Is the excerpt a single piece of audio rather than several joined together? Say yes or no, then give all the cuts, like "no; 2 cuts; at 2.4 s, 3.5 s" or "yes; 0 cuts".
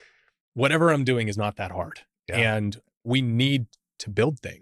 no; 1 cut; at 2.9 s